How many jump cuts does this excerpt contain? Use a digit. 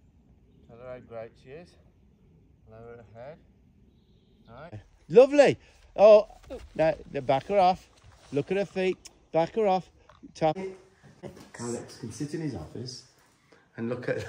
2